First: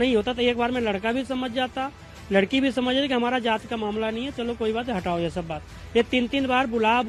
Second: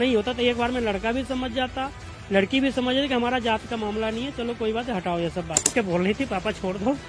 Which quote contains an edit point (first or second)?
second